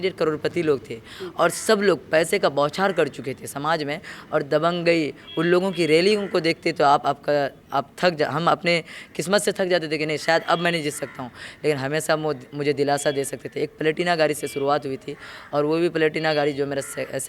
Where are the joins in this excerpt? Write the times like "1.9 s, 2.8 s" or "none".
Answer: none